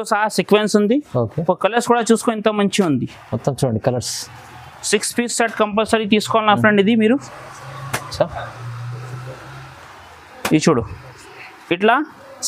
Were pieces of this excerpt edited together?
no; 0 cuts

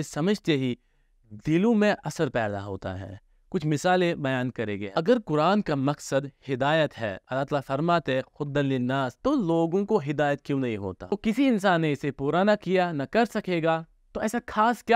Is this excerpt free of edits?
no; 2 cuts; at 4.8 s, 11.0 s

